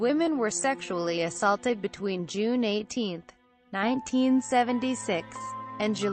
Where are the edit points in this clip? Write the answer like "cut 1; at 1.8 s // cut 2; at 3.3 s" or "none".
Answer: cut 1; at 5.1 s